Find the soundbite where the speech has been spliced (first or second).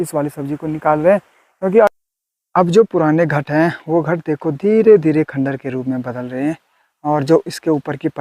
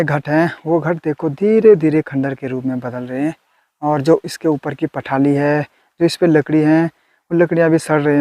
first